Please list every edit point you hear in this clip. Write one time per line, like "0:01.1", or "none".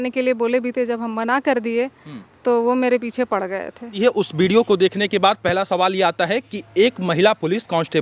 0:04.0